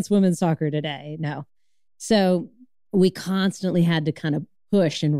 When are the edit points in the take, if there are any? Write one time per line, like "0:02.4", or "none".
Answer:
none